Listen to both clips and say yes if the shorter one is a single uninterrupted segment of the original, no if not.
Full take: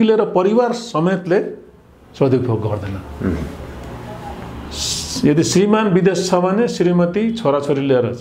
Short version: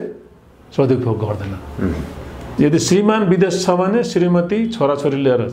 no